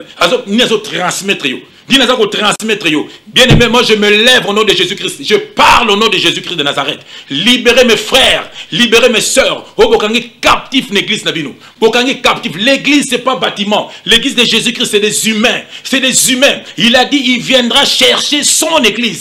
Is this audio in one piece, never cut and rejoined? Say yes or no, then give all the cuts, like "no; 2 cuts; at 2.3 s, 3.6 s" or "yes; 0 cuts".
yes; 0 cuts